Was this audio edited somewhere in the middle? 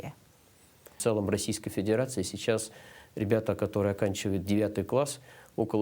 yes; 1 cut; at 0.9 s

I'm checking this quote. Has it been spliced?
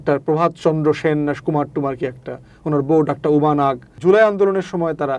yes; 1 cut; at 3.9 s

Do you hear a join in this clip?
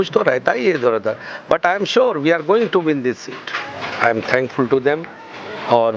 yes; 1 cut; at 3.7 s

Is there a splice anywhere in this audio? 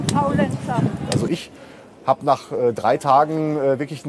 no; 0 cuts

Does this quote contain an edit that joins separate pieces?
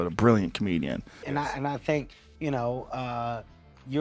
yes; 1 cut; at 1.3 s

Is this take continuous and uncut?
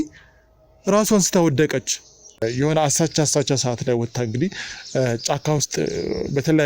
no; 1 cut; at 2.4 s

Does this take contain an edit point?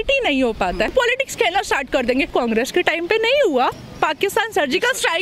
yes; 3 cuts; at 0.9 s, 2.3 s, 3.8 s

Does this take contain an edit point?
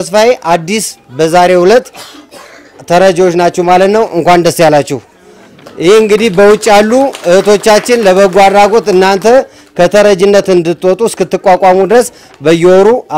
no; 0 cuts

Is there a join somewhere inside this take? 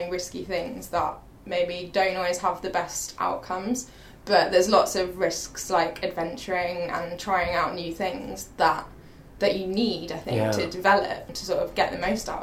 no; 0 cuts

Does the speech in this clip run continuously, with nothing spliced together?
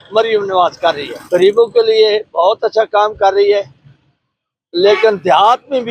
yes; 0 cuts

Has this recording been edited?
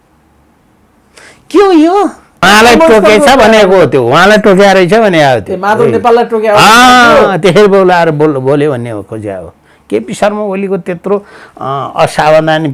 yes; 1 cut; at 2.5 s

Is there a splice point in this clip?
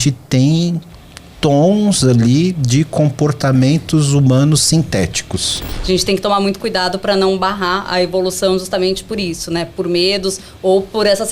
yes; 1 cut; at 5.7 s

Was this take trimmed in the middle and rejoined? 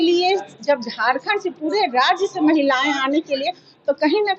no; 0 cuts

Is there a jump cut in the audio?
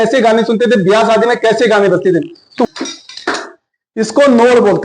yes; 1 cut; at 2.5 s

